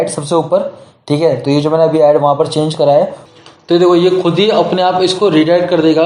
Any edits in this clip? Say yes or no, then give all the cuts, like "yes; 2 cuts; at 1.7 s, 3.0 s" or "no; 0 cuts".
yes; 1 cut; at 3.3 s